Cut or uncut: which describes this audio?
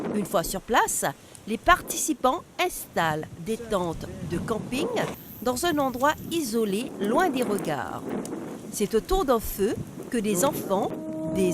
cut